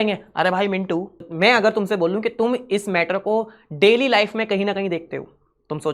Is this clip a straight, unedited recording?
no; 1 cut; at 1.2 s

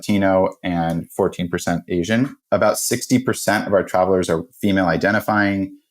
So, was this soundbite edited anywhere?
yes; 1 cut; at 2.4 s

